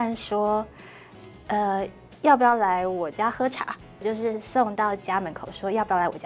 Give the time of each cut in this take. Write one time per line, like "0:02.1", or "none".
0:04.0